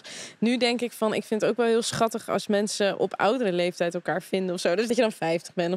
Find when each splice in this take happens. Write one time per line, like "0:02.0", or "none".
0:04.9